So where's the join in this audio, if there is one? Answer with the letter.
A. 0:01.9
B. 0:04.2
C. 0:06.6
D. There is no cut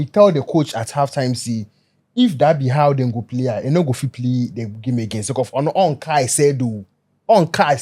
D